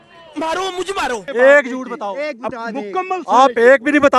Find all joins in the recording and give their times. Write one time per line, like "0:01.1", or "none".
0:01.2